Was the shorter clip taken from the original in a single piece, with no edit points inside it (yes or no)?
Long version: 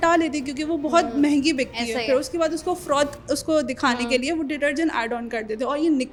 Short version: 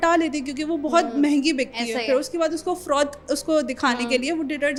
yes